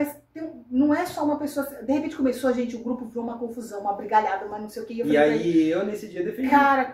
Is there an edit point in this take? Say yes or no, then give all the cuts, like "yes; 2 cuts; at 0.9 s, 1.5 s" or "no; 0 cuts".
no; 0 cuts